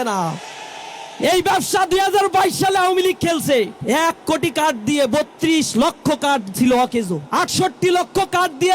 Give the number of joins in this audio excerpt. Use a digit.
2